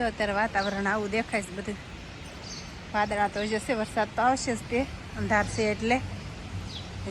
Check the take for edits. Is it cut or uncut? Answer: uncut